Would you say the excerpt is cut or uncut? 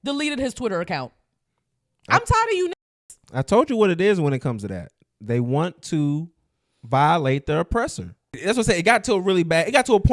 cut